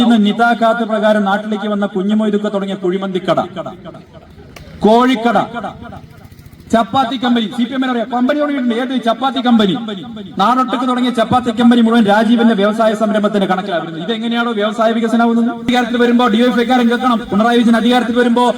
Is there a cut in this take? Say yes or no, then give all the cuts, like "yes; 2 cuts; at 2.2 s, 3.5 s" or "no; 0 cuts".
yes; 1 cut; at 15.7 s